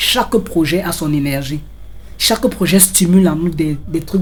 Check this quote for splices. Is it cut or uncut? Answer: uncut